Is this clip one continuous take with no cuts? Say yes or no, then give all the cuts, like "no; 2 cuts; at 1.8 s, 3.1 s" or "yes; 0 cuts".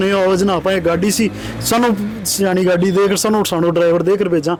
yes; 0 cuts